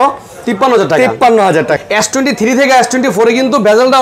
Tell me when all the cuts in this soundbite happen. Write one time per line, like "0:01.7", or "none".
0:01.8